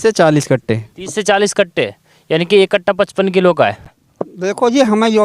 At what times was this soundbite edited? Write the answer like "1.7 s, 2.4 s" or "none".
4.0 s